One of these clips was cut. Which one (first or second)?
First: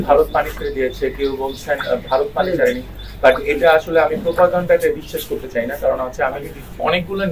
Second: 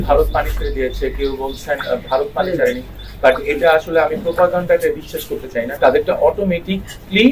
second